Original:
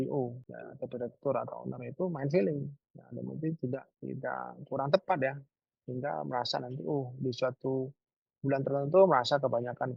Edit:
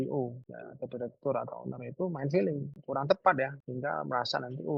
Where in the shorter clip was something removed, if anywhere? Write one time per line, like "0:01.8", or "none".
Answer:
0:02.8
0:03.6